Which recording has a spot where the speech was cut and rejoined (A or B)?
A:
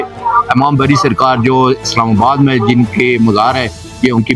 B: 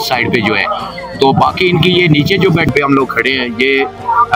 B